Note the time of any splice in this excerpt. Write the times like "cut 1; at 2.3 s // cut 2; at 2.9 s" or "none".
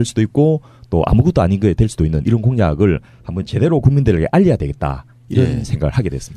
cut 1; at 3.1 s